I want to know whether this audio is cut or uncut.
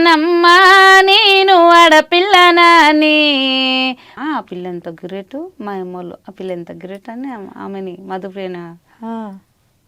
cut